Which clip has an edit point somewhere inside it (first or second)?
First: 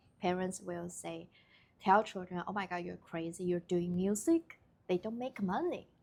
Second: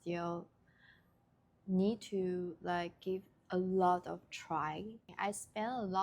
second